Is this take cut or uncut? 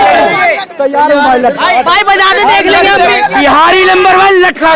uncut